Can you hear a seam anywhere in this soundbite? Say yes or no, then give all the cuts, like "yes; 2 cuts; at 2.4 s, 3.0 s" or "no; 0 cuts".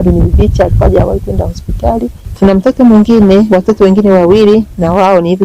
yes; 1 cut; at 2.2 s